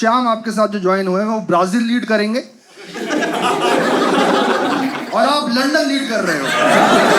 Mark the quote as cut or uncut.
uncut